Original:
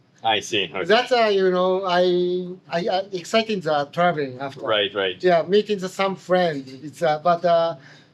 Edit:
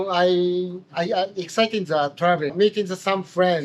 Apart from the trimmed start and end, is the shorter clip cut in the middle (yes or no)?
yes